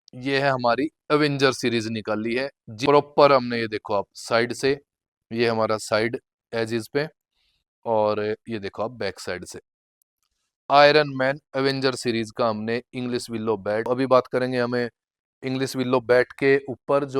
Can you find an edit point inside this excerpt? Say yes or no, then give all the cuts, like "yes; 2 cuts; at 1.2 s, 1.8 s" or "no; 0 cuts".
yes; 2 cuts; at 2.7 s, 13.9 s